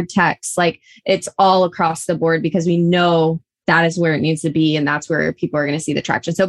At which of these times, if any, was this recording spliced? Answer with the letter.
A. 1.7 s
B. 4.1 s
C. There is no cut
C